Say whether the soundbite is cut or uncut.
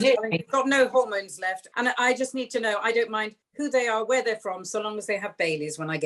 cut